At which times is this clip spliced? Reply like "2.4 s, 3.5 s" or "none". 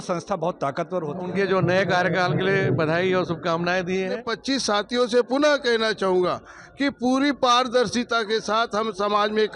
1.2 s, 4.3 s